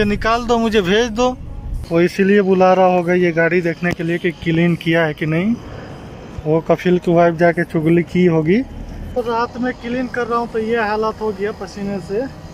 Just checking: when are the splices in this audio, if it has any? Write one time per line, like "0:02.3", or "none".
0:01.8
0:09.2